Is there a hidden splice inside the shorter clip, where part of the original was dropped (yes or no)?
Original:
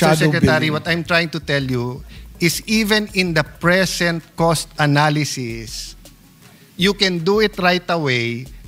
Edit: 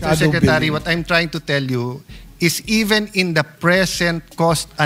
no